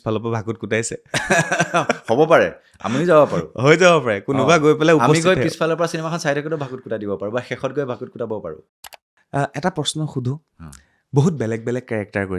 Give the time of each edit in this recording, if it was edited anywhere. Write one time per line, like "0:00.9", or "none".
0:08.6